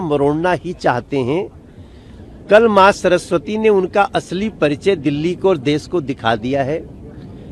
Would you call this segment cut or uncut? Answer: uncut